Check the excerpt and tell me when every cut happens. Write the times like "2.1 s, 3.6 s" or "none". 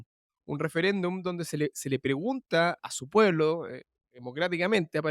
2.8 s